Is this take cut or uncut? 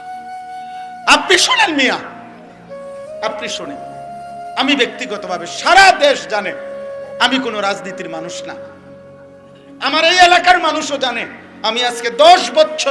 cut